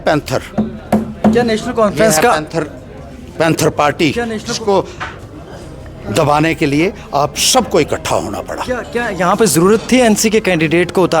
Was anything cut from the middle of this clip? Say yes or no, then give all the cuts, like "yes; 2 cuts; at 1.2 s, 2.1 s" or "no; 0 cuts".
no; 0 cuts